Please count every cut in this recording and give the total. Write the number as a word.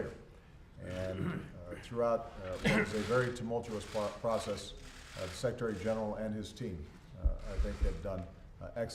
one